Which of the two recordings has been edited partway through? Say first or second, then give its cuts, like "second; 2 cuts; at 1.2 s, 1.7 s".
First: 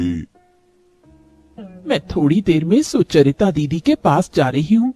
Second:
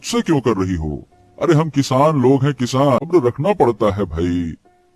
second; 1 cut; at 3.0 s